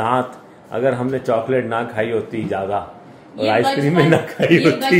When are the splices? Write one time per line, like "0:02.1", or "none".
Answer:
none